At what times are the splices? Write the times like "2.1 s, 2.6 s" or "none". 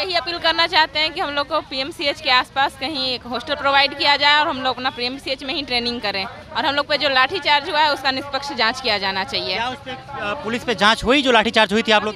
none